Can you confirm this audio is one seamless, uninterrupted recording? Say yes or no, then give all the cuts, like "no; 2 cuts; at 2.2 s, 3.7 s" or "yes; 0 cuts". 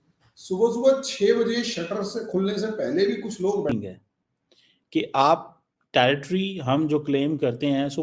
no; 1 cut; at 3.7 s